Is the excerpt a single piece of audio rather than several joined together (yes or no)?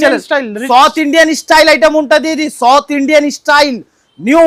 yes